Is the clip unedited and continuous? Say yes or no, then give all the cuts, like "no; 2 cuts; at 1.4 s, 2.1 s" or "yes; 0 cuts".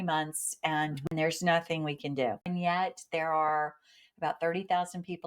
no; 2 cuts; at 1.1 s, 2.5 s